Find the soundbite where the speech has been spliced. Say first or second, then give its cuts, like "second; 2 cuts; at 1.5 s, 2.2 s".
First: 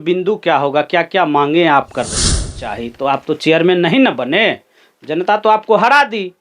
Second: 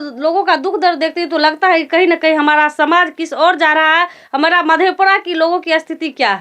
first; 1 cut; at 2.5 s